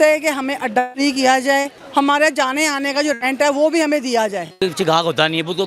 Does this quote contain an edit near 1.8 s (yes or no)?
yes